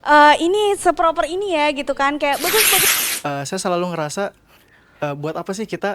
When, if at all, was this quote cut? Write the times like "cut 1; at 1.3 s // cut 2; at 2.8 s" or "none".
cut 1; at 2.8 s